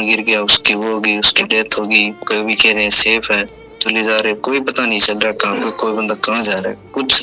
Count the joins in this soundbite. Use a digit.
1